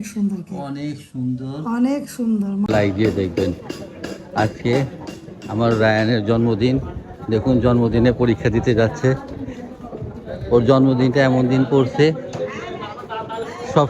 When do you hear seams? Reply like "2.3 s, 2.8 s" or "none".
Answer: 2.7 s